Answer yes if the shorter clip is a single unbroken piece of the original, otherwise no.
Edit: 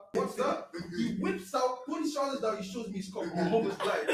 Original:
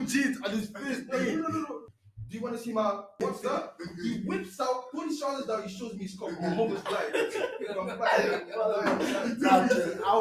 yes